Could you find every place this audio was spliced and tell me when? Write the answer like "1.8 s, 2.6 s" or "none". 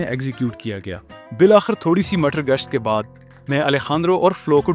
1.2 s